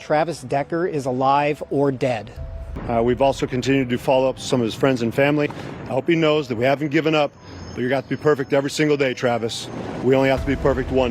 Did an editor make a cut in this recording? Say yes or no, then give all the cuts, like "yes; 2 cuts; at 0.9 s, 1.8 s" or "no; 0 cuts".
yes; 2 cuts; at 2.5 s, 5.6 s